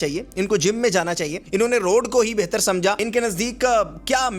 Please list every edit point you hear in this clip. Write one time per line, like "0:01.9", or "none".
0:01.3
0:03.0